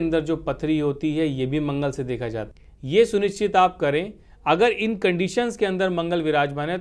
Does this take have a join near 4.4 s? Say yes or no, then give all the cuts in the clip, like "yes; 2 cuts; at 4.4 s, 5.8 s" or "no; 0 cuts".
no; 1 cut; at 2.5 s